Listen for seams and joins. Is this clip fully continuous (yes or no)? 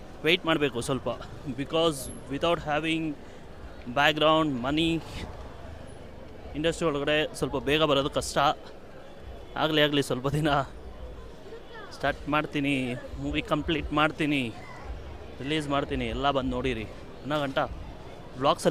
yes